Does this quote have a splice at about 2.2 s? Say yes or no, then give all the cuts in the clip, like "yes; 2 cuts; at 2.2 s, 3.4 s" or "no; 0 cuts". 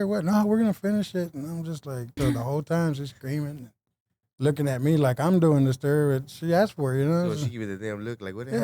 yes; 1 cut; at 2.2 s